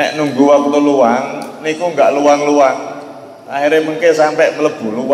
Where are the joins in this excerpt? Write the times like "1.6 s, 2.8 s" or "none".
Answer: none